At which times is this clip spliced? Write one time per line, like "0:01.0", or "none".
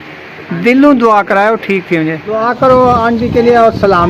0:02.4